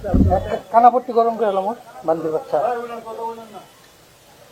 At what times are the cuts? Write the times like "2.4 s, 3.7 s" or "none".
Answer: none